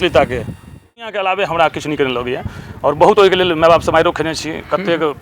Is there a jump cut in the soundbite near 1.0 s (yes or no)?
yes